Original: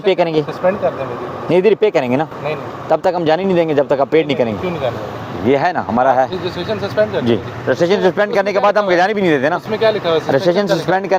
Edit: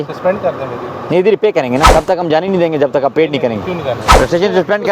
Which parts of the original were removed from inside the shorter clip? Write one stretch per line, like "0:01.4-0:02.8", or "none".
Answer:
0:02.3-0:02.8
0:05.0-0:07.5